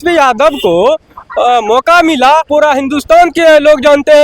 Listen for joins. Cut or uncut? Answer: cut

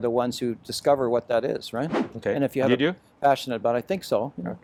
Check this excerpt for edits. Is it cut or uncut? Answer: uncut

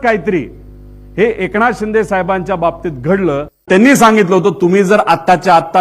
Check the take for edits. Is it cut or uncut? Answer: cut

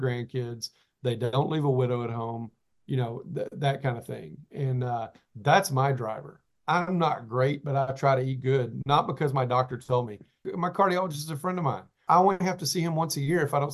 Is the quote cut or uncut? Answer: cut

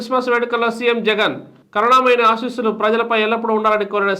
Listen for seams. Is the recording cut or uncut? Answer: uncut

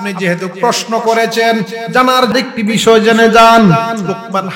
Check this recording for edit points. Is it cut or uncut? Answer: cut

